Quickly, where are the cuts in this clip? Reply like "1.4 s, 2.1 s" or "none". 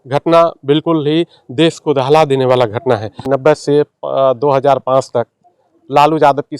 3.2 s